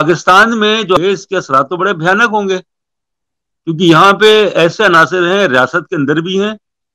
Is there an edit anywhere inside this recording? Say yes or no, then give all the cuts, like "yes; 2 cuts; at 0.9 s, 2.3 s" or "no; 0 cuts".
yes; 1 cut; at 1.0 s